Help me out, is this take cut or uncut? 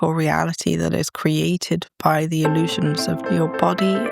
cut